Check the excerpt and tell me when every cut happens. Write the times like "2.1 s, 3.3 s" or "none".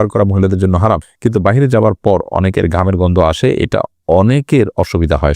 1.1 s